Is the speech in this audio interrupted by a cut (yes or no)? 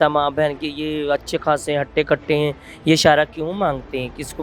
no